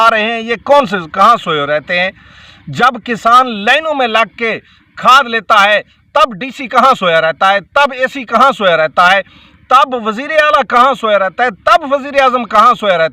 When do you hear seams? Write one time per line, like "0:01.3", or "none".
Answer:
none